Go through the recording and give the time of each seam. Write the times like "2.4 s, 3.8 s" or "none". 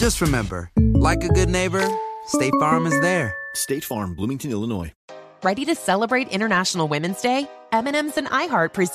4.9 s